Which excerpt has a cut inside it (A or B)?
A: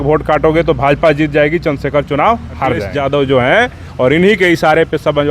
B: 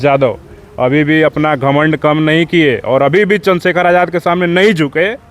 A